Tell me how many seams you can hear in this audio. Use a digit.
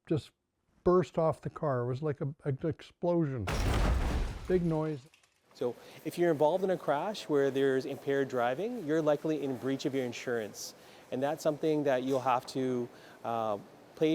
1